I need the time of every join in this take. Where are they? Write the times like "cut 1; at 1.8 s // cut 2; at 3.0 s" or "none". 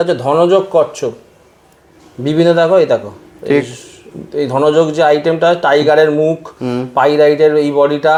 none